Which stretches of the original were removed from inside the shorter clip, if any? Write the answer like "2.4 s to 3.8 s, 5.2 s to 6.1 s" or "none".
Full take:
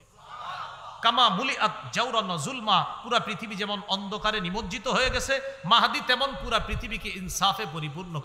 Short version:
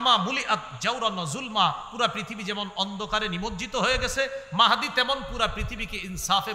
none